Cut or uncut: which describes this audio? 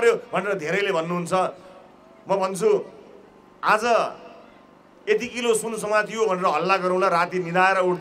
uncut